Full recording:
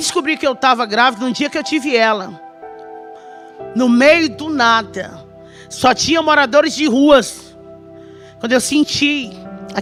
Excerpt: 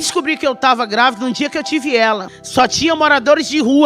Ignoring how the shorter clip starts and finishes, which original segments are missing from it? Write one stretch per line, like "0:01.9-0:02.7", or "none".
0:02.3-0:05.6